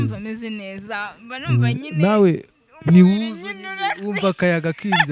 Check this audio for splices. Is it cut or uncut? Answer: uncut